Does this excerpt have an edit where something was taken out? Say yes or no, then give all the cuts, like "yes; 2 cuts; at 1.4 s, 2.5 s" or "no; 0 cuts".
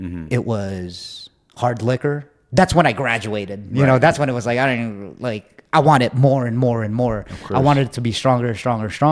no; 0 cuts